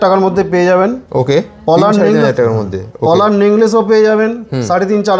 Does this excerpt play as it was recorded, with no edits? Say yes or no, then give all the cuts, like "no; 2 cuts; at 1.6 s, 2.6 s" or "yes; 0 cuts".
yes; 0 cuts